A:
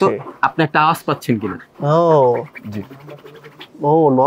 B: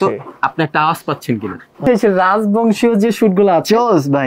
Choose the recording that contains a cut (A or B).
B